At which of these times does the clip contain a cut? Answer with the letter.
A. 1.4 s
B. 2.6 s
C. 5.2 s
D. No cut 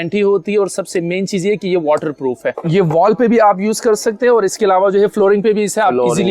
B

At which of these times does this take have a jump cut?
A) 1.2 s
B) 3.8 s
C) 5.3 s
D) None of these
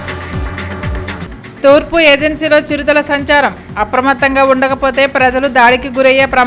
A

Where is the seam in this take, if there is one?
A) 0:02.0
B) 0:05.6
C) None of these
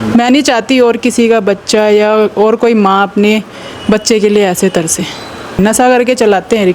B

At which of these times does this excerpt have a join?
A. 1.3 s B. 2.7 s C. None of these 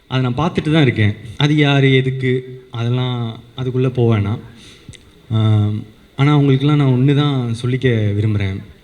A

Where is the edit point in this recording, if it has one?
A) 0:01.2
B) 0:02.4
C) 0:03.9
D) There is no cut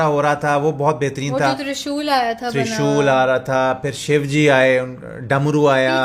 C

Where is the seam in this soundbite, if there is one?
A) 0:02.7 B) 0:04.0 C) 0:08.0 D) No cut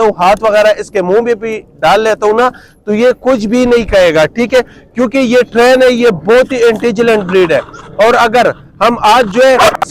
D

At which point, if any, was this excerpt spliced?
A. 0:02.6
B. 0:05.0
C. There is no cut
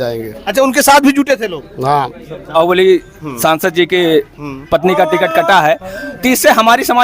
A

